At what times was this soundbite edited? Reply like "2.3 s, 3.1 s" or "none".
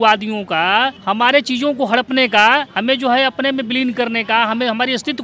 1.0 s, 2.7 s